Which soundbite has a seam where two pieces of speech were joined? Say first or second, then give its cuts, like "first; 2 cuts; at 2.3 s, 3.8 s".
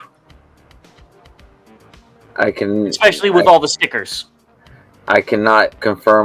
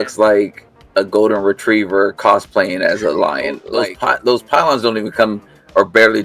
second; 1 cut; at 3.6 s